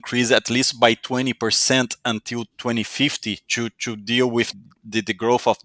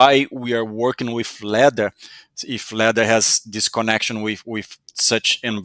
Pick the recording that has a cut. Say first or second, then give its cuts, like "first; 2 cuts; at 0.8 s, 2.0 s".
first; 1 cut; at 4.6 s